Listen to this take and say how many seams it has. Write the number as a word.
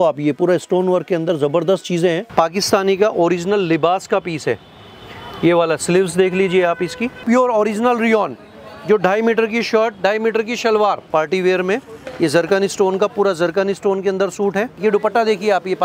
four